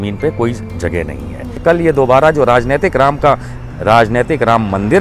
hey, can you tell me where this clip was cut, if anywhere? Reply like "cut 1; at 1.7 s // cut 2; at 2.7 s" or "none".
cut 1; at 1.6 s

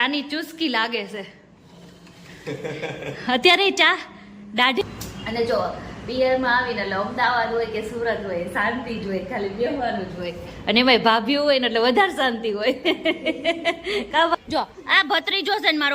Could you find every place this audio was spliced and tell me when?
cut 1; at 4.8 s // cut 2; at 14.3 s

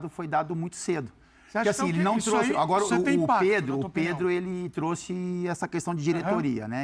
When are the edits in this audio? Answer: none

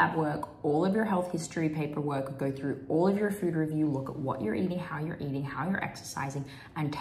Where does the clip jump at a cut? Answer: none

